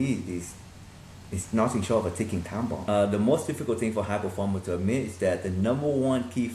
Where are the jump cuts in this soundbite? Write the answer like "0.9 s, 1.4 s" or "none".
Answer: 2.8 s